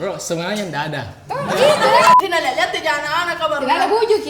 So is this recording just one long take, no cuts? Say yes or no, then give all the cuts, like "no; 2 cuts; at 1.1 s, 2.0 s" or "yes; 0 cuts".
no; 1 cut; at 2.1 s